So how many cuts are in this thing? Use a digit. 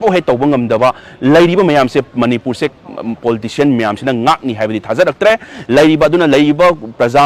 0